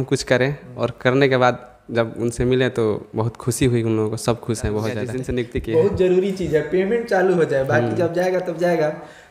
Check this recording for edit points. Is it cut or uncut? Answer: cut